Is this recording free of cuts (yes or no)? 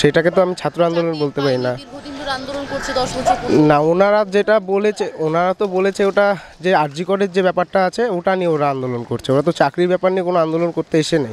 yes